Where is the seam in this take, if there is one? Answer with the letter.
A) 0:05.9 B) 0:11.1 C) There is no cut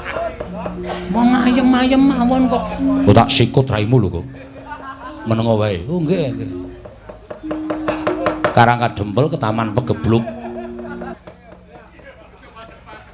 B